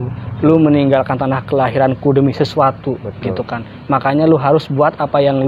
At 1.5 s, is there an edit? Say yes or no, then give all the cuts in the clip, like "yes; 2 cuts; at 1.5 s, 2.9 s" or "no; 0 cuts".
no; 0 cuts